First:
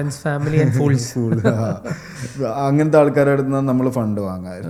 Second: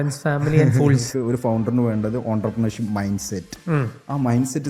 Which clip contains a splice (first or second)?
second